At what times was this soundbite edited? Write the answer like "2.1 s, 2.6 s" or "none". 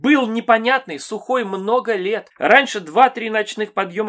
2.3 s

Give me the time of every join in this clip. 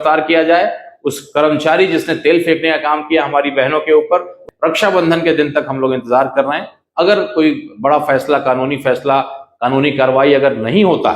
4.4 s

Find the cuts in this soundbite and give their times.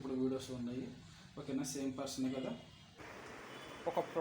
2.9 s

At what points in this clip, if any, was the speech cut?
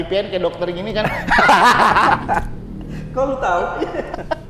none

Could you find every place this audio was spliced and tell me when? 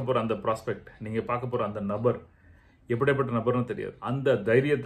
3.9 s

